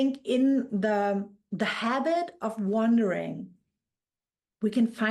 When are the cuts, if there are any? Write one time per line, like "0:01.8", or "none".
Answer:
none